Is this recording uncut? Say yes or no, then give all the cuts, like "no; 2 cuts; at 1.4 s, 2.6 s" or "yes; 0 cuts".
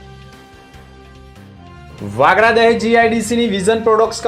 yes; 0 cuts